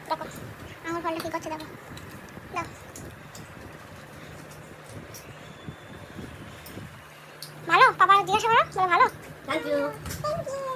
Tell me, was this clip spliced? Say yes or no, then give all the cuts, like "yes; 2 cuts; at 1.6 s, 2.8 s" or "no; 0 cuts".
no; 0 cuts